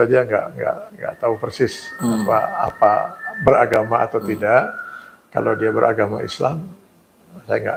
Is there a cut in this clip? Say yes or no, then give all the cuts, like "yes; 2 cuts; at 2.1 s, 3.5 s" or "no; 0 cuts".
no; 0 cuts